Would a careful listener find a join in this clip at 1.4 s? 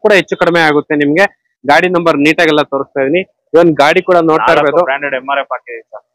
no; 0 cuts

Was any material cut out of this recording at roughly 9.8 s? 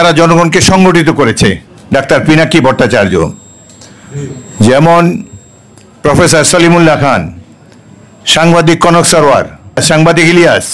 yes; 2 cuts; at 1.6 s, 9.8 s

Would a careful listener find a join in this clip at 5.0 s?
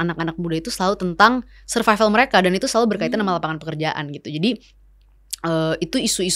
no; 0 cuts

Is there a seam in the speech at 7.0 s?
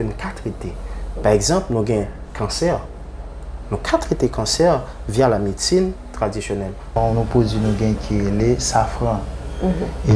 yes; 1 cut; at 7.0 s

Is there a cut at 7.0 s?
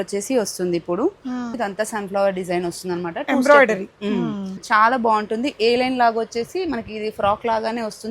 no; 2 cuts; at 1.6 s, 4.5 s

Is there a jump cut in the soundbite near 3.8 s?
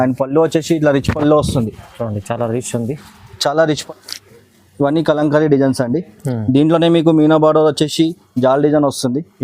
yes; 1 cut; at 3.8 s

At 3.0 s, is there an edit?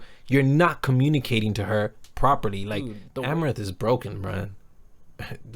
yes; 1 cut; at 3.0 s

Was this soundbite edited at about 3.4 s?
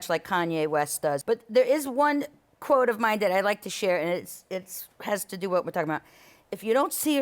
no; 1 cut; at 1.2 s

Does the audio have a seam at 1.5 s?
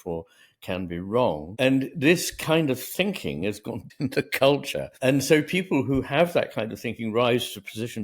yes; 3 cuts; at 1.5 s, 3.9 s, 4.8 s

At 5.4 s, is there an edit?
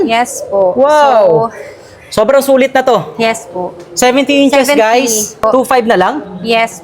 yes; 1 cut; at 5.4 s

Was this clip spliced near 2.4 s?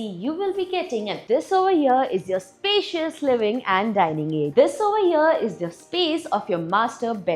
no; 2 cuts; at 1.2 s, 4.5 s

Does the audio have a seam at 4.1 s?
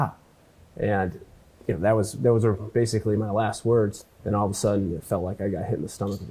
yes; 1 cut; at 4.1 s

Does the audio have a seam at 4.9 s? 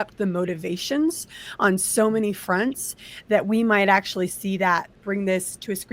yes; 1 cut; at 4.9 s

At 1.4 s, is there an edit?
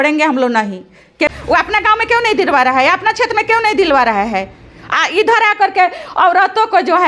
yes; 1 cut; at 1.4 s

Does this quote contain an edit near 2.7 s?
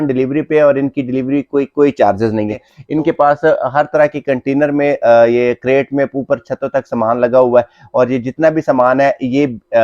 yes; 1 cut; at 2.7 s

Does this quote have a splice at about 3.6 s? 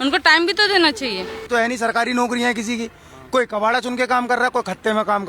no; 1 cut; at 1.5 s

